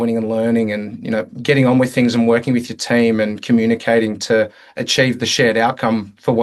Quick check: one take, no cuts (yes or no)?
yes